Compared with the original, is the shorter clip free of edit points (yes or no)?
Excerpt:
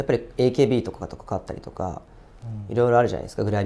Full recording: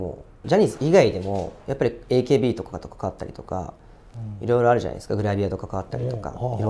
yes